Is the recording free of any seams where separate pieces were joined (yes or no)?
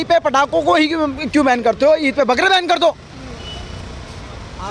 yes